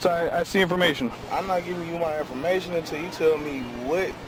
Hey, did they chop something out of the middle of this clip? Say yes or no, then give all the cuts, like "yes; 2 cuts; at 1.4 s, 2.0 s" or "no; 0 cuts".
no; 0 cuts